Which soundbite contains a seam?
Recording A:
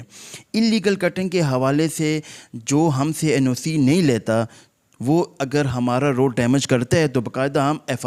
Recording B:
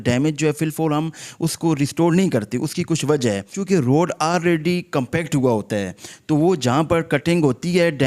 B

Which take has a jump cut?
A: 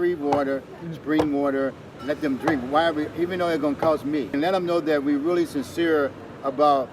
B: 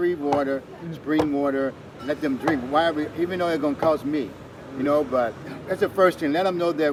A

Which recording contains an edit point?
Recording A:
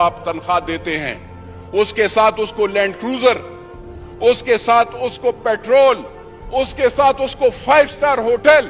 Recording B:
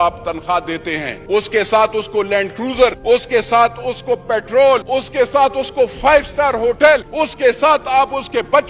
B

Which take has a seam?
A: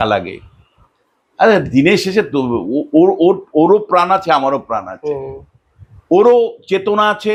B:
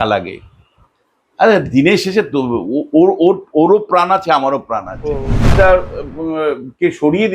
B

